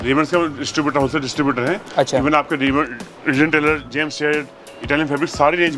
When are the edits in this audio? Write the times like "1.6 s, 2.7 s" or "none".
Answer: none